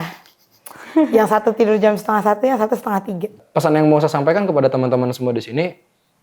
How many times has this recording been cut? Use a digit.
1